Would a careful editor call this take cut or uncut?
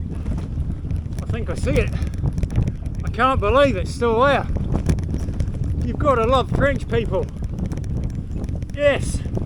uncut